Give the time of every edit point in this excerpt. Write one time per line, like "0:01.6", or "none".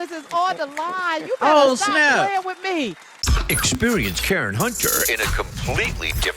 0:03.3